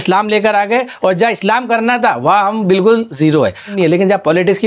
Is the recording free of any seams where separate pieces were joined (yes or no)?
no